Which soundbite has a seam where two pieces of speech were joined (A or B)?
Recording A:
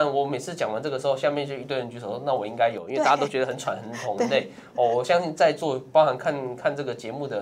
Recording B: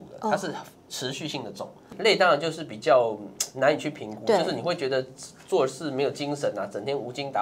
B